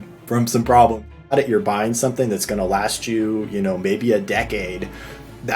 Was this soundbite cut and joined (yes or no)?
yes